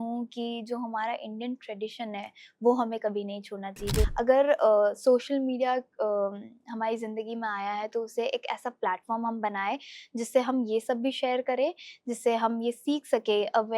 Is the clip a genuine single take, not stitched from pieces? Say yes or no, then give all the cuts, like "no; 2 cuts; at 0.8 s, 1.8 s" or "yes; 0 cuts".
no; 1 cut; at 4.1 s